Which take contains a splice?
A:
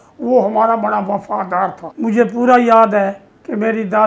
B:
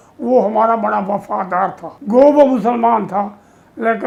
A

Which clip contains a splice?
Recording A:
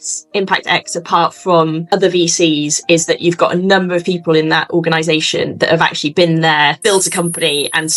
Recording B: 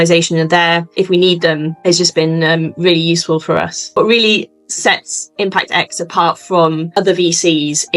B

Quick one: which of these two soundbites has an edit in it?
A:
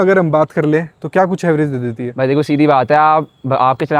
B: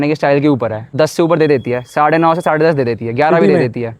B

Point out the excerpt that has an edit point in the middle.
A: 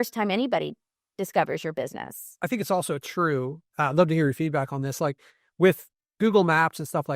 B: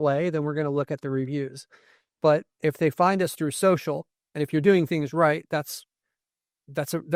A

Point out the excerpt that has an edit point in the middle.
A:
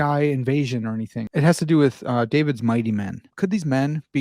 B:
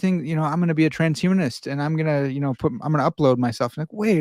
A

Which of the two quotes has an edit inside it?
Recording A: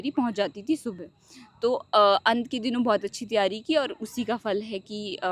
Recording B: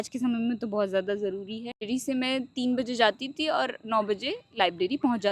B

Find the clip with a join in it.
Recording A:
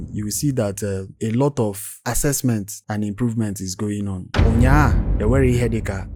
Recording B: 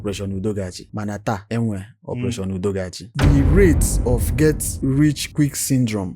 B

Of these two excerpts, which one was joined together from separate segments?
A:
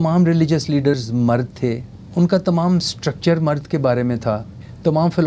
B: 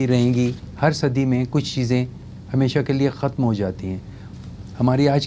A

